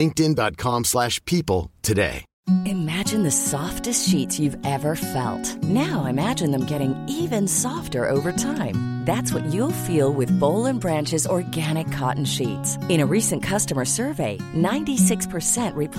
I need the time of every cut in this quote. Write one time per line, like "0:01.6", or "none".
0:02.3